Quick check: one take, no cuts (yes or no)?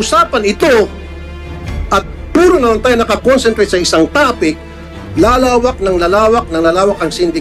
yes